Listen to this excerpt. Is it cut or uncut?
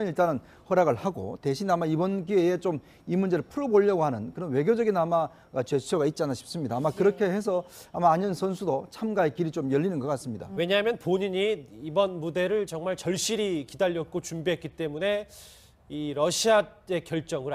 uncut